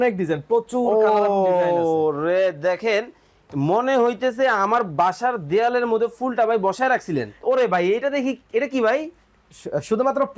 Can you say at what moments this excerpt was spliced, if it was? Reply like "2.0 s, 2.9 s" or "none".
7.4 s